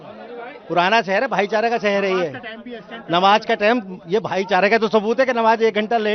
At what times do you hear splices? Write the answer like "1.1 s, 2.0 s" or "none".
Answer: none